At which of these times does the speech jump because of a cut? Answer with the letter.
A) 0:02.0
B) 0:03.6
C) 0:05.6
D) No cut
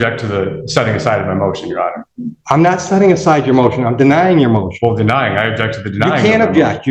D